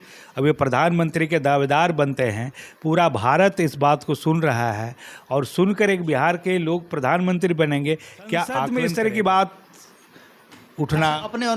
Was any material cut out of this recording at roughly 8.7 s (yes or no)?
yes